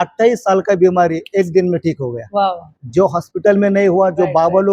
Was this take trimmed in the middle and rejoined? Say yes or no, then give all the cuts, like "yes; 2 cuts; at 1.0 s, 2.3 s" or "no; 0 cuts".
no; 0 cuts